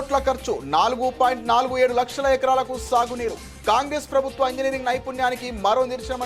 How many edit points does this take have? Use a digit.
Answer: 0